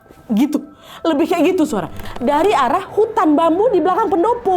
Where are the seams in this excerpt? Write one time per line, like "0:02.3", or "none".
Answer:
0:02.0